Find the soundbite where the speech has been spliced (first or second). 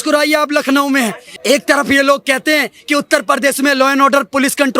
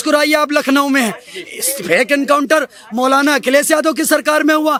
first